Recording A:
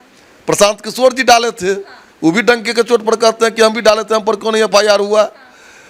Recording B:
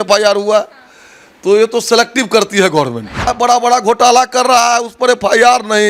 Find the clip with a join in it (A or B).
B